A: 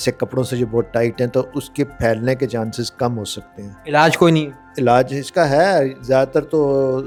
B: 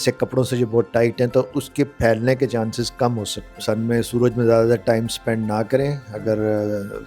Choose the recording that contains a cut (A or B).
B